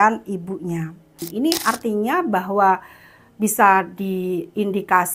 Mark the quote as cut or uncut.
cut